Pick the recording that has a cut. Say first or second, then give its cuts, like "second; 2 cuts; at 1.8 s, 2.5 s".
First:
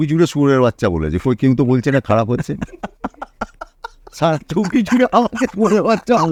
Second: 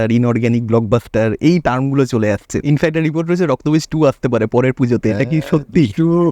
second; 1 cut; at 2.5 s